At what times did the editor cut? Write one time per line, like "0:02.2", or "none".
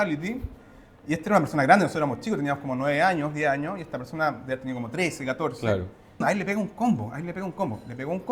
0:06.2